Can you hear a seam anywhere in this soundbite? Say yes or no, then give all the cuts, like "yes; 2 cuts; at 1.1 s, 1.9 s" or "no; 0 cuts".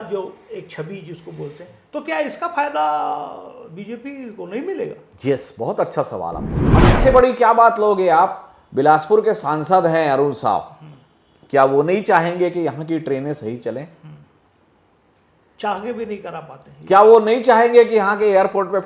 yes; 1 cut; at 6.6 s